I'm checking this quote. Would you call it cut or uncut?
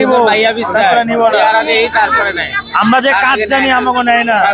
uncut